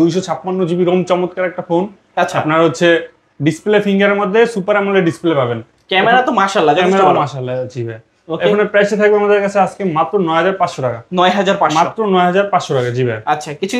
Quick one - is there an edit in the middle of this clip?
no; 0 cuts

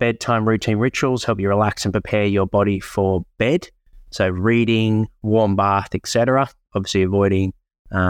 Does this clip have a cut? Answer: no; 0 cuts

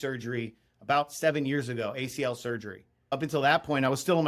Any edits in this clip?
yes; 1 cut; at 3.1 s

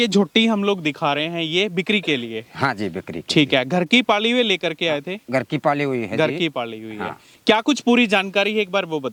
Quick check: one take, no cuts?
yes; 0 cuts

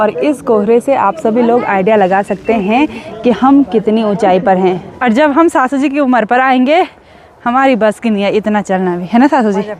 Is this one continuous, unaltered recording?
no; 1 cut; at 4.9 s

